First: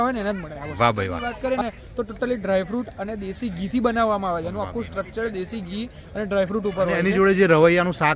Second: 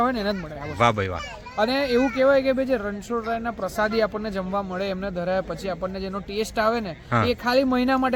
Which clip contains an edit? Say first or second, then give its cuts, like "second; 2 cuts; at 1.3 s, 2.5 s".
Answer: first; 2 cuts; at 1.2 s, 7.0 s